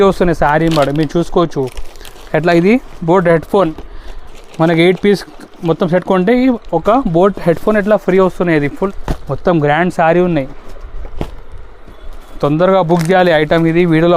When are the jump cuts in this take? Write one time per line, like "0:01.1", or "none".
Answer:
0:08.7